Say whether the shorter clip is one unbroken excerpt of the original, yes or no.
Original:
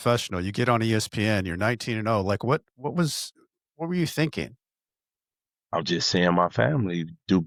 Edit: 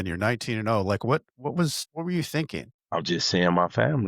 no